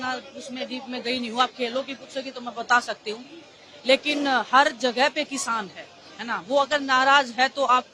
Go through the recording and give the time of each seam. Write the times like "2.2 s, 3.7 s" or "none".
none